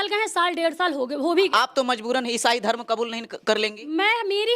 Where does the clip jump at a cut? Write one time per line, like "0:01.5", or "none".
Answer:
0:01.5